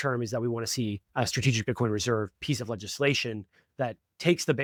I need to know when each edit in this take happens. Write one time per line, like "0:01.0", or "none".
none